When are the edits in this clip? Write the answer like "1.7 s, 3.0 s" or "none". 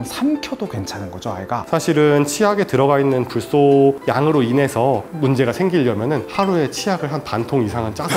1.6 s